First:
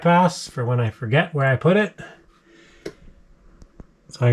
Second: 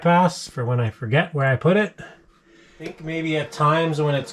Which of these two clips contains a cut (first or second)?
second